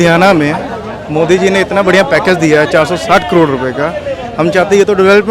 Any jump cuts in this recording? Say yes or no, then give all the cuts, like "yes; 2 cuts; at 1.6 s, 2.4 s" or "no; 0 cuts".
no; 0 cuts